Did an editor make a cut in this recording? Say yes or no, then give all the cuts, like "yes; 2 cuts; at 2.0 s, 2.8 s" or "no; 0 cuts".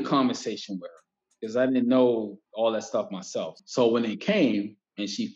yes; 2 cuts; at 2.4 s, 3.6 s